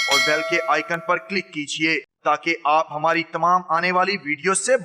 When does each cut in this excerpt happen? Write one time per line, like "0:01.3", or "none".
none